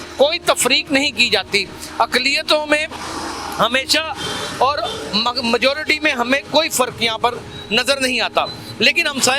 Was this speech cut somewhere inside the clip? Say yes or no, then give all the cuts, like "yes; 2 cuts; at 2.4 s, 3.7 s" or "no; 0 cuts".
no; 0 cuts